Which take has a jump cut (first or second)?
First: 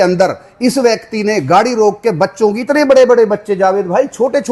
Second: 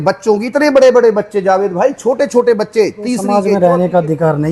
second